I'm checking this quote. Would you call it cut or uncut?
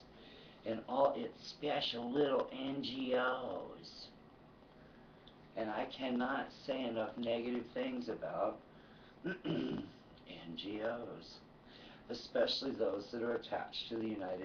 cut